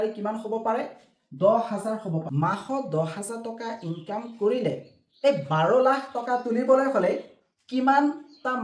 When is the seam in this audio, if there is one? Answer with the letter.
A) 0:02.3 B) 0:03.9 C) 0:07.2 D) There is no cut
A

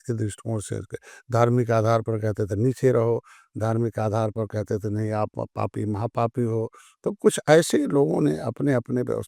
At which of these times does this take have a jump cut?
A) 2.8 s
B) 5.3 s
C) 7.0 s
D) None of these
D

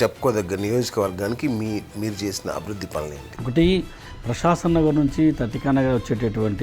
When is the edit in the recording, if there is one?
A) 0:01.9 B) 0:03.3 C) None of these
B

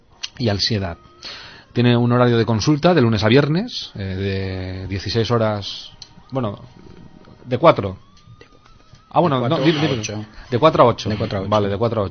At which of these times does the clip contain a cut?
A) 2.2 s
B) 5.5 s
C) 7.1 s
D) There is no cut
B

